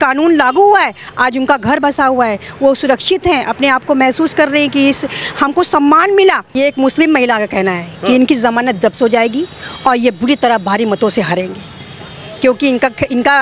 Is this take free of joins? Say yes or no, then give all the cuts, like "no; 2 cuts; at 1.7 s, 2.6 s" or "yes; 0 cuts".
no; 1 cut; at 6.5 s